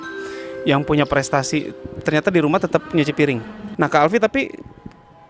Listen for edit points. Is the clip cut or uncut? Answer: cut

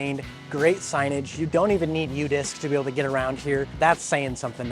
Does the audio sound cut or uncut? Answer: cut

